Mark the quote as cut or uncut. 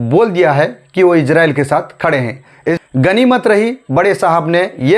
cut